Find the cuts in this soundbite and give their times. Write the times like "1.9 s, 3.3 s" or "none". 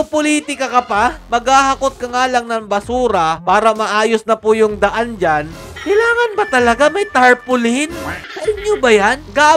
1.2 s